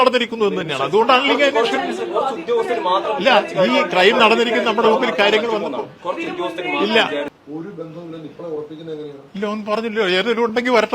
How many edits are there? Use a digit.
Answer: 1